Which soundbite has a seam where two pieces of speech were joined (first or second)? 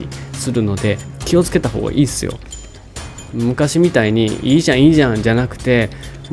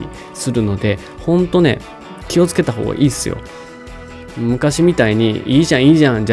first